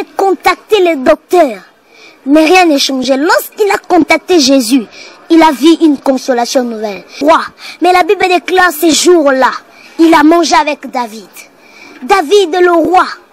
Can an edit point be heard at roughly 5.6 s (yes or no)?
no